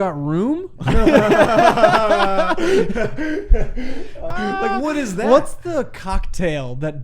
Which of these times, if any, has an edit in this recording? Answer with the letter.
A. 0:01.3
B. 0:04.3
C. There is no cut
B